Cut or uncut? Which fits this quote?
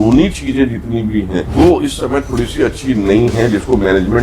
cut